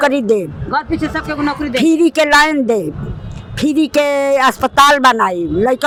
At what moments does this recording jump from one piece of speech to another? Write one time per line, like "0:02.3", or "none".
none